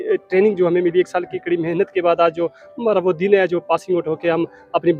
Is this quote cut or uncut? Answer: uncut